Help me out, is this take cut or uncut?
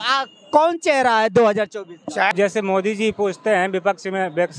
cut